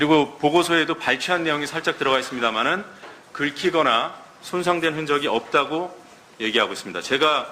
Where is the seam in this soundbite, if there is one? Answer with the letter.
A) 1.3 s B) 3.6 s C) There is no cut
B